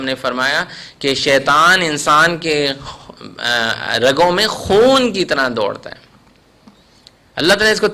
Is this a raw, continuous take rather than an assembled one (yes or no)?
yes